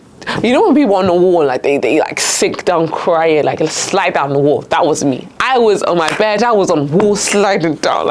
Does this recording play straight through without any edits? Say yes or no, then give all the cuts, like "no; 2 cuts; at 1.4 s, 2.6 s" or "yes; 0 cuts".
yes; 0 cuts